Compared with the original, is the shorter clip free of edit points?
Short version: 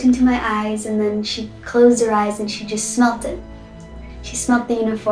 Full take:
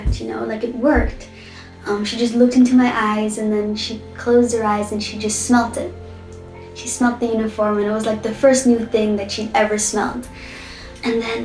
yes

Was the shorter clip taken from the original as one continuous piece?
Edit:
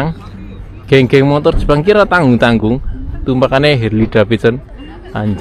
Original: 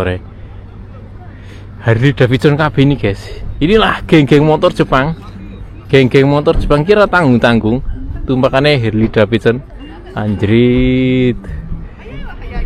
yes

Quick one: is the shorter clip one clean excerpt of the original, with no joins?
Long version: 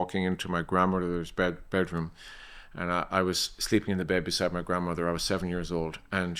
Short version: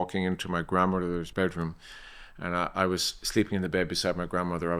no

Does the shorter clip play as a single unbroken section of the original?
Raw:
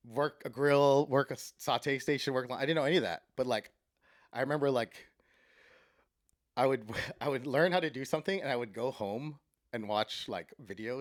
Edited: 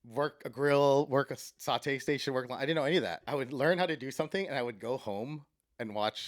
no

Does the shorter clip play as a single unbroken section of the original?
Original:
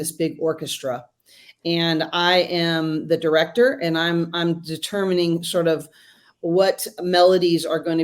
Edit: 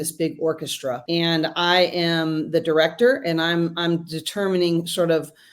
no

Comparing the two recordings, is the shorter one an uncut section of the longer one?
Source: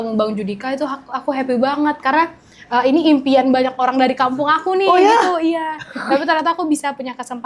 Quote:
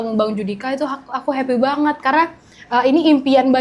yes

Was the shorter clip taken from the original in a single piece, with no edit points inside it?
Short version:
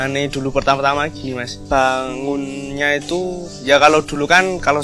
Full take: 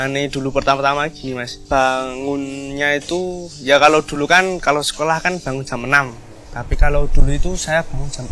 yes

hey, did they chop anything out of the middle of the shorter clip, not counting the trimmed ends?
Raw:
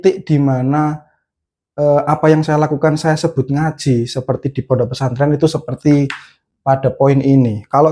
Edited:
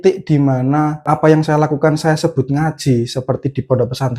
yes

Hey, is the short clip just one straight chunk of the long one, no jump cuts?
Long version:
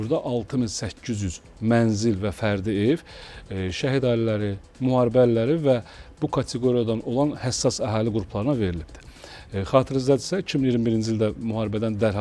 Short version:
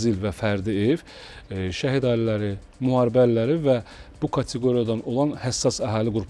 yes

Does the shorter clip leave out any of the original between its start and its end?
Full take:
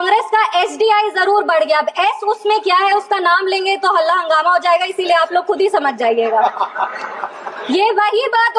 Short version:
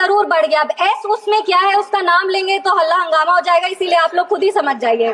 no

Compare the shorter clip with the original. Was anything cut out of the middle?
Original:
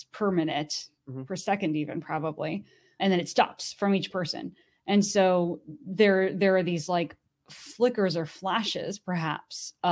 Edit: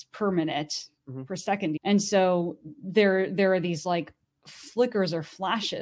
yes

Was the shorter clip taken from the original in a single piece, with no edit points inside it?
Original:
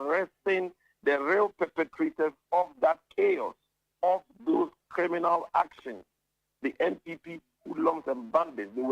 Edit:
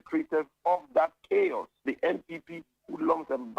no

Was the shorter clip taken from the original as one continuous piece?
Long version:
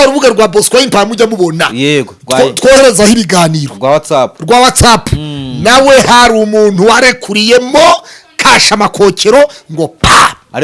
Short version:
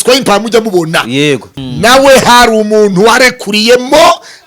no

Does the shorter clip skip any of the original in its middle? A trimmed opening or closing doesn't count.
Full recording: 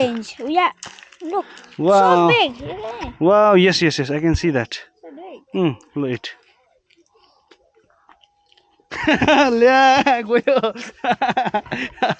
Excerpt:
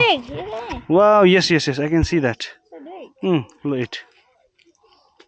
no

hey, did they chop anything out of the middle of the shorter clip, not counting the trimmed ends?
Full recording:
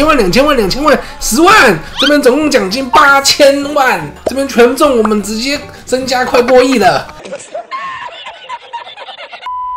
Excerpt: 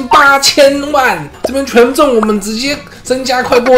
no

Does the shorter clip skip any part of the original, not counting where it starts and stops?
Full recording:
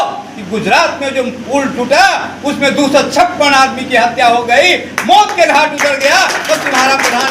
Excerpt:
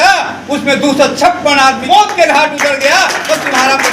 yes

